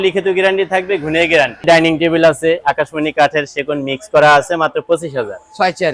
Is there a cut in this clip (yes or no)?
yes